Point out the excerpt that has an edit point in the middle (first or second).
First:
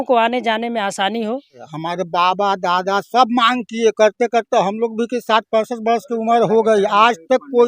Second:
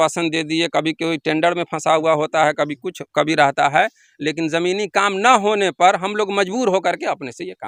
first